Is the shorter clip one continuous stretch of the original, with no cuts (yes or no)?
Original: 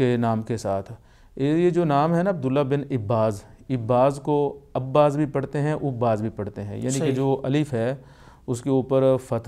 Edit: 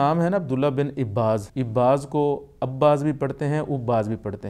no